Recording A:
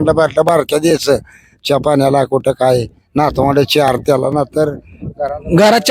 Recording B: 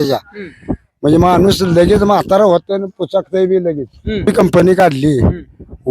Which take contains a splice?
B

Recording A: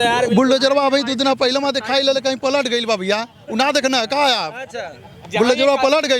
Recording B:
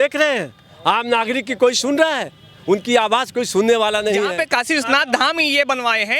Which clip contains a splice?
B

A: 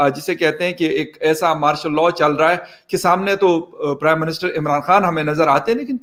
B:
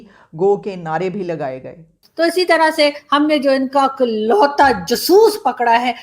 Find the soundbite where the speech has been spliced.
B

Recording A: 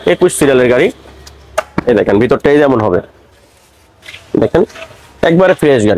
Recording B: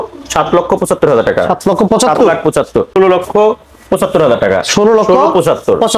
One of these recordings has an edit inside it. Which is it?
B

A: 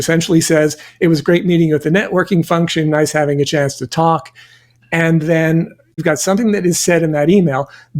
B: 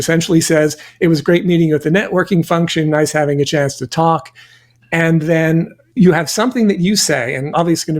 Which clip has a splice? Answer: A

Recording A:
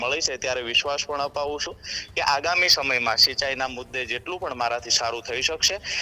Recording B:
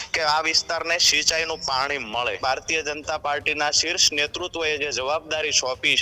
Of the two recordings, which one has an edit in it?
B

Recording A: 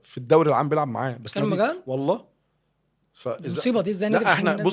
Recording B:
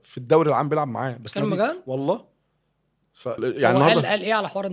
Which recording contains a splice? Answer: B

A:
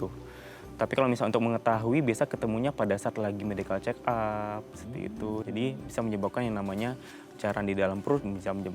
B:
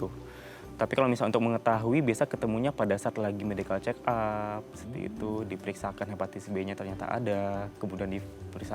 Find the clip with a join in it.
A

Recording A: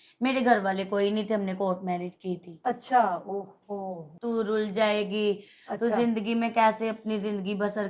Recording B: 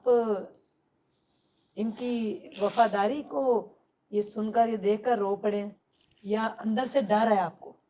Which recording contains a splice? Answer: A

